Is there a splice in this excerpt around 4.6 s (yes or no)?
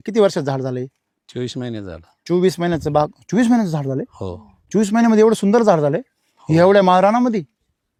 no